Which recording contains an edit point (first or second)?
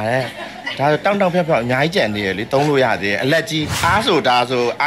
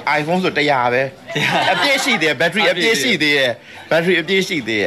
first